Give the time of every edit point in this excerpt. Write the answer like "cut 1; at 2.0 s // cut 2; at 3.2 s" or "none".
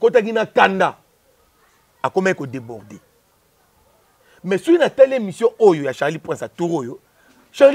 none